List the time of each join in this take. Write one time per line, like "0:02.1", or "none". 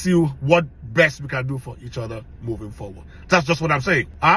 none